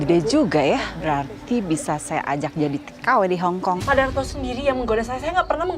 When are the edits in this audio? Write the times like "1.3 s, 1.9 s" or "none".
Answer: 0.9 s, 3.8 s